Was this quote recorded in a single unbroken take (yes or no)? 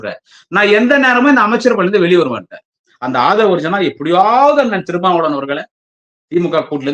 yes